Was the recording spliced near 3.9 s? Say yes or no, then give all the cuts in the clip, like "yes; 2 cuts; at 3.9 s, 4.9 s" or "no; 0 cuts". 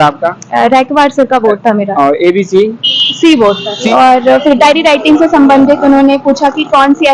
yes; 1 cut; at 3.9 s